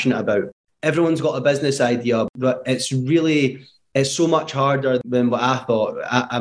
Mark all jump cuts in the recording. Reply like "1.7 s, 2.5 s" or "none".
2.3 s, 5.0 s